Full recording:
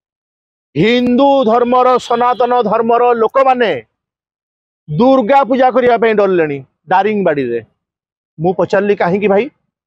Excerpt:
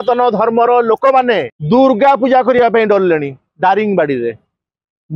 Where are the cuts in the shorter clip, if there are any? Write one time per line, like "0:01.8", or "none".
0:01.5